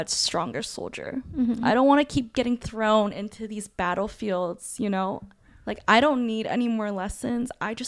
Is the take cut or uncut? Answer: uncut